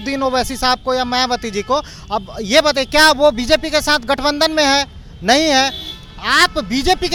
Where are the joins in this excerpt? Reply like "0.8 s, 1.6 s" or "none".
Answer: none